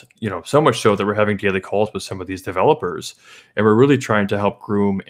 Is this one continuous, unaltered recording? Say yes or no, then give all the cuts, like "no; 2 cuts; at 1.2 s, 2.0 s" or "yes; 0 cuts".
yes; 0 cuts